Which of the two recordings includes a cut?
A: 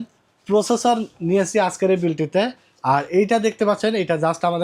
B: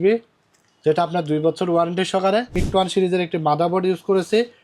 B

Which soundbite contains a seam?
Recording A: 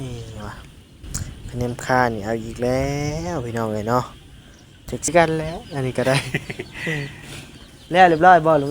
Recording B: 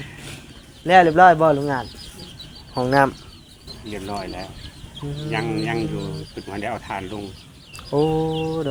A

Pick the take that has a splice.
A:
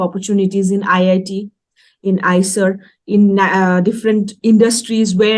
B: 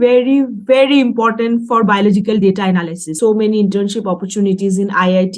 B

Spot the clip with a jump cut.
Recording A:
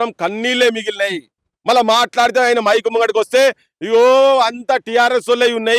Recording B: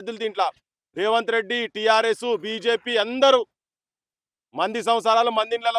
A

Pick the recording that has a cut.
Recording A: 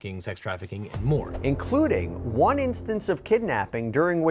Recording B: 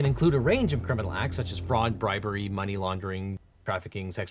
A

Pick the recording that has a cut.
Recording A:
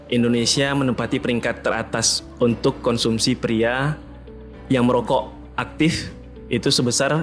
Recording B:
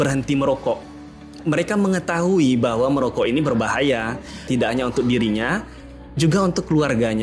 B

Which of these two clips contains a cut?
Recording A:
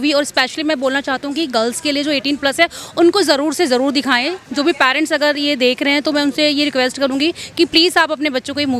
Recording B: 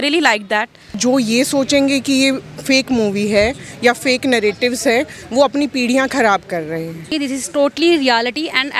B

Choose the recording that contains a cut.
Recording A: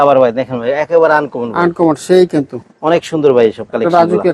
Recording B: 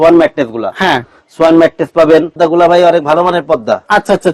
B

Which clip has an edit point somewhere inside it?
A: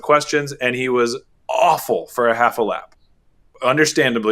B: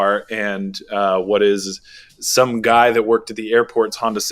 A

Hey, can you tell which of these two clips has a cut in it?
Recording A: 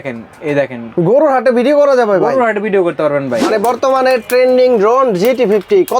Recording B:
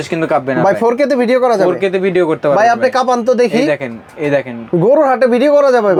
A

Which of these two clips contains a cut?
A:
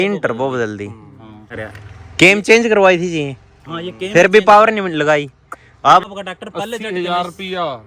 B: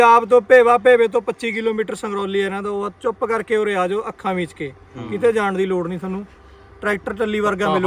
A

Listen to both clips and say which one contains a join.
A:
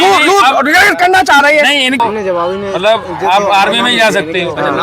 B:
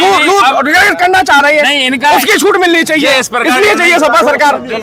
A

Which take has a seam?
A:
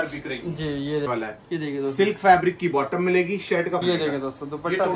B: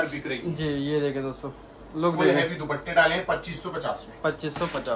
A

